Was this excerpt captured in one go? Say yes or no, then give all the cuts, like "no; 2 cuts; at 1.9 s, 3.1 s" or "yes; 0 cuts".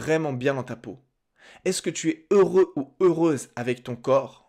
yes; 0 cuts